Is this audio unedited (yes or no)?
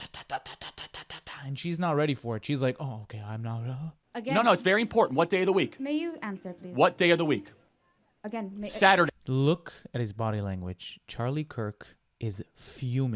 no